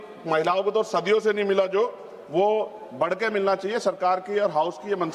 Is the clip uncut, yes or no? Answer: yes